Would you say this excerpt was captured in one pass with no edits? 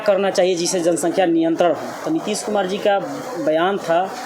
yes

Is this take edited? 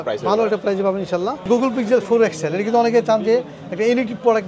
yes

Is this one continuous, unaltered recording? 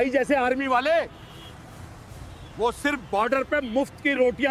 yes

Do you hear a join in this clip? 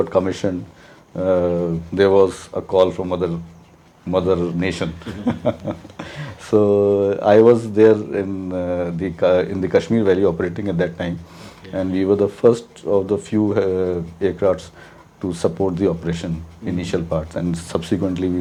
no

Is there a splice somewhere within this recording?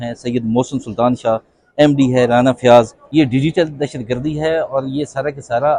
yes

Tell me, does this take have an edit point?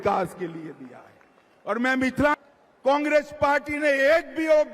yes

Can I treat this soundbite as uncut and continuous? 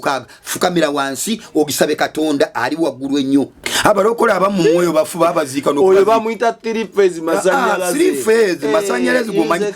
no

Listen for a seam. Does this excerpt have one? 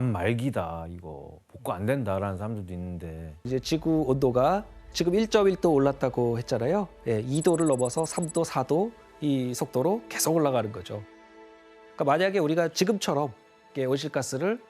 yes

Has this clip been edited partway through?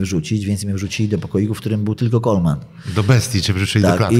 no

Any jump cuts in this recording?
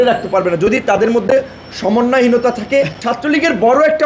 yes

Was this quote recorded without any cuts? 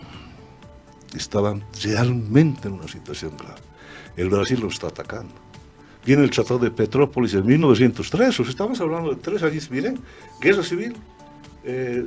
yes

